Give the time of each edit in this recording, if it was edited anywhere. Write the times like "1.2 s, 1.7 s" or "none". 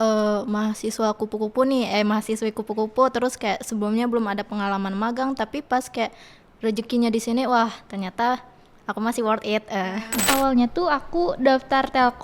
10.2 s